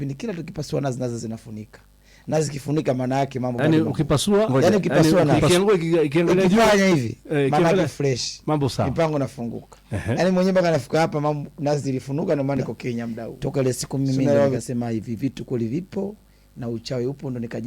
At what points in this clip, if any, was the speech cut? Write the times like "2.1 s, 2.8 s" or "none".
3.6 s, 13.3 s